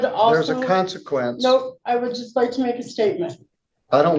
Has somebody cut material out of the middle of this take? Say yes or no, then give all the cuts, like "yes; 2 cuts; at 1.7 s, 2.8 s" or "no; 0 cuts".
no; 0 cuts